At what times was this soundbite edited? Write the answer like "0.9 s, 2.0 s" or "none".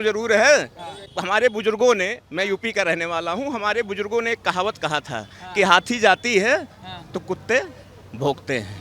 1.1 s